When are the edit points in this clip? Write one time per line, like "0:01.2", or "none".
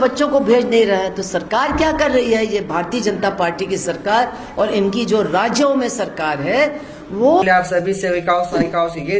0:07.4